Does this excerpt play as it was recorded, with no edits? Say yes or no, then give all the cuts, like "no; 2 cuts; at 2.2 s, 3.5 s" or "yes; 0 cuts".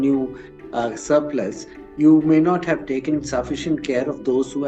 yes; 0 cuts